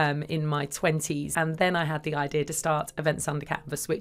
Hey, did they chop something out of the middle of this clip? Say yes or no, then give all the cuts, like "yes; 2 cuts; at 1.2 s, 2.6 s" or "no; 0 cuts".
yes; 1 cut; at 1.3 s